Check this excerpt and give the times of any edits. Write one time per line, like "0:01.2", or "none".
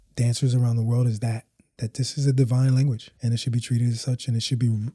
0:03.1

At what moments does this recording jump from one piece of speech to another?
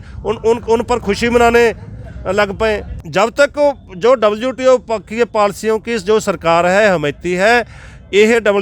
0:03.0

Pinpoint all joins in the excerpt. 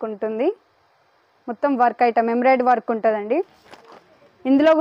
0:03.5

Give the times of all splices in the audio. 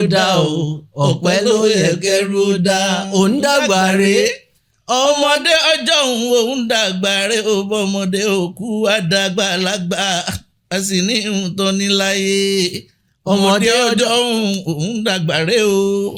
none

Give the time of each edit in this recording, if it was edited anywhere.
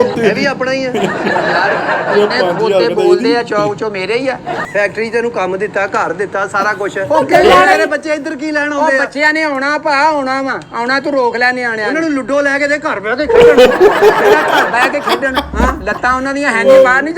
0:04.6

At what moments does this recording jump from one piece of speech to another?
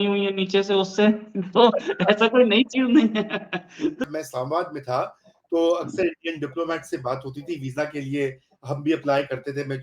0:04.1

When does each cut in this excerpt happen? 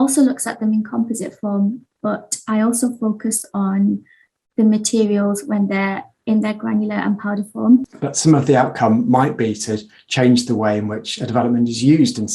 0:08.0

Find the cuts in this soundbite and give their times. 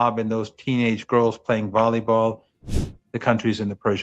0:02.8

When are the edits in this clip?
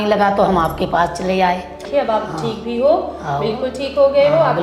0:01.9

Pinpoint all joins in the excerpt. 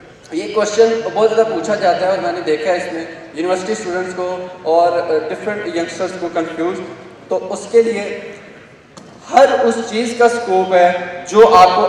none

